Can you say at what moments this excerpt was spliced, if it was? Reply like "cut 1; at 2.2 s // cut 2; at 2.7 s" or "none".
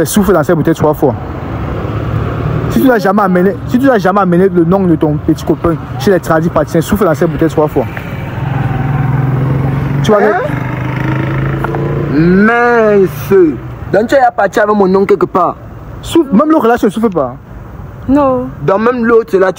none